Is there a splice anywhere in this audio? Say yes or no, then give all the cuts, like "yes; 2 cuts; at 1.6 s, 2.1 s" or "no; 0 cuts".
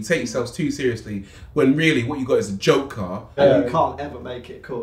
yes; 1 cut; at 3.4 s